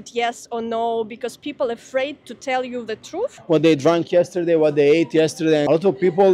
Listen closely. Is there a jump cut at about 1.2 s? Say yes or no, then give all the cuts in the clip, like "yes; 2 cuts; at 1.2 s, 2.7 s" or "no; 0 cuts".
no; 1 cut; at 3.4 s